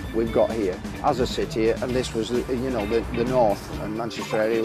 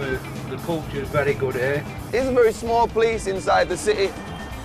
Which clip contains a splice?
first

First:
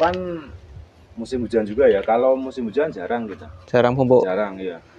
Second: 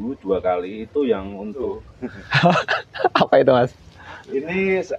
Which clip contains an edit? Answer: second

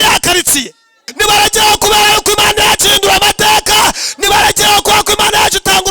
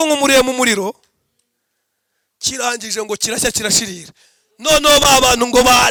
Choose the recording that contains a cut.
first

